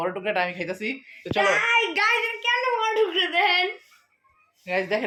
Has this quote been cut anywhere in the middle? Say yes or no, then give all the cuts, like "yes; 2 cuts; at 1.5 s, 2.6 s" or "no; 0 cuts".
no; 0 cuts